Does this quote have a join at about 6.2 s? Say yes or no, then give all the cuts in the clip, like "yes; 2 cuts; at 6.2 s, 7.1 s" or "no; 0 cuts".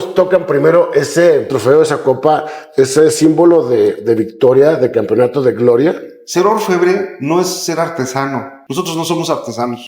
yes; 1 cut; at 6.2 s